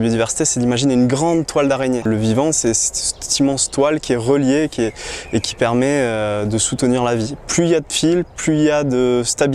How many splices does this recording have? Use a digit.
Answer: 1